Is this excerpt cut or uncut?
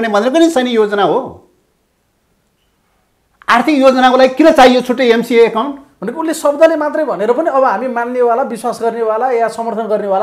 uncut